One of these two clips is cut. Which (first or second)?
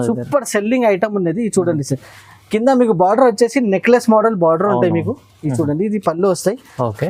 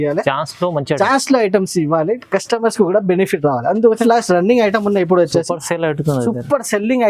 second